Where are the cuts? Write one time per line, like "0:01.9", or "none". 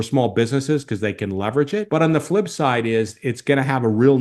none

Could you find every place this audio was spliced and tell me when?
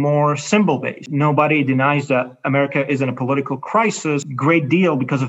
0:01.0
0:04.3

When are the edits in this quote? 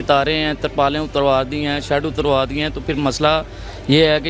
none

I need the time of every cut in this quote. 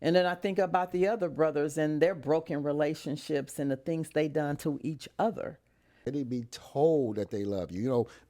0:06.0

